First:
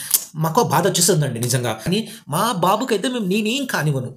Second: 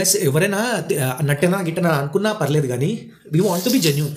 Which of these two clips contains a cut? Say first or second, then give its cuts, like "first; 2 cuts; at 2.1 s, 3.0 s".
first; 1 cut; at 1.8 s